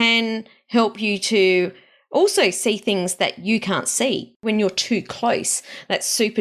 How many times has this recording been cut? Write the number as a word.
one